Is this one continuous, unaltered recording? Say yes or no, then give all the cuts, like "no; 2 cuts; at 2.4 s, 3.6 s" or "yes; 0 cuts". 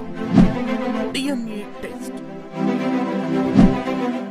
yes; 0 cuts